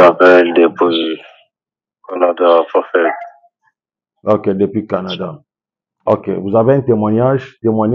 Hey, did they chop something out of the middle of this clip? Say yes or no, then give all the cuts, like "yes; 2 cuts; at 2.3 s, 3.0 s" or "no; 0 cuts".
no; 0 cuts